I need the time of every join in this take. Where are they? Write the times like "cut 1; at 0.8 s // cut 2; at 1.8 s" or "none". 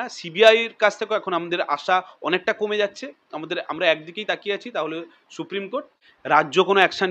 cut 1; at 6.1 s